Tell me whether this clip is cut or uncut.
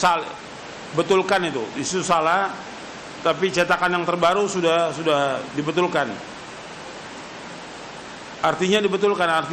uncut